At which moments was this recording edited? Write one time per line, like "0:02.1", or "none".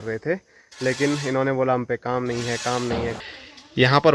0:03.2